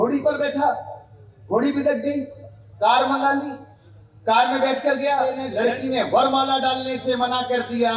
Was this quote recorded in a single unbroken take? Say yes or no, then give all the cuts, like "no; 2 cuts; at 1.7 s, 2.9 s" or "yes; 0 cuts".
no; 1 cut; at 5.4 s